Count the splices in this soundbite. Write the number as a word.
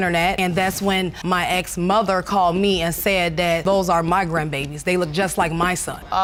zero